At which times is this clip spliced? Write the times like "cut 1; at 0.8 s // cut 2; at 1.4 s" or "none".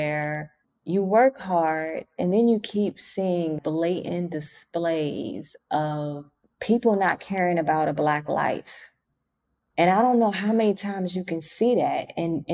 cut 1; at 3.6 s